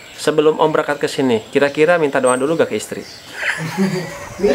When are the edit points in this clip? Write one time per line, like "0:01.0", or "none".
none